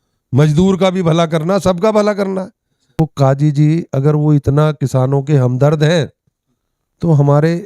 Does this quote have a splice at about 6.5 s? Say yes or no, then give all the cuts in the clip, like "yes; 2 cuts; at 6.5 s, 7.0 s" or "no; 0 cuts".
no; 1 cut; at 3.0 s